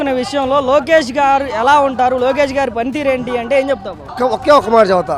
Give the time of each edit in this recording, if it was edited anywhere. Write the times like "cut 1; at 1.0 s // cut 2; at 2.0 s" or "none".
none